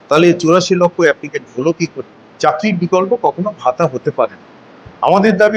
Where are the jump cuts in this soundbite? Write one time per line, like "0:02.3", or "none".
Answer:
0:02.2